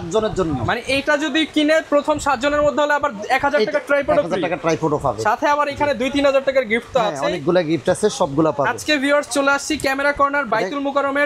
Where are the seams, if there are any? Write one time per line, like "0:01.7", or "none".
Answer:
none